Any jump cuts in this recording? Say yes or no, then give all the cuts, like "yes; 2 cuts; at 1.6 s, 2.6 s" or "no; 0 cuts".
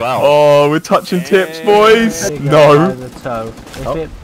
yes; 1 cut; at 2.3 s